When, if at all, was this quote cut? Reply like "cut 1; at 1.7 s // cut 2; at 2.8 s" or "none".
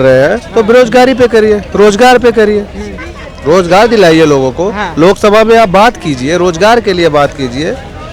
none